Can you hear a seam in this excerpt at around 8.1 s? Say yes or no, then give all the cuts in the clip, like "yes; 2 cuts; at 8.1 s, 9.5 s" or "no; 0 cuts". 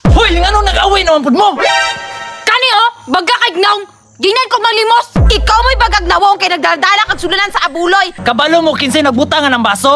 yes; 1 cut; at 8.1 s